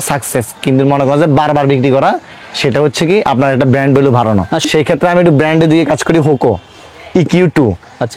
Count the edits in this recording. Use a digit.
0